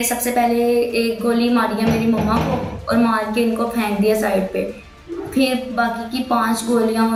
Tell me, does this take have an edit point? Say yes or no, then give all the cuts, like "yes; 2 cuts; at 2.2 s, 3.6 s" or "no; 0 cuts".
no; 0 cuts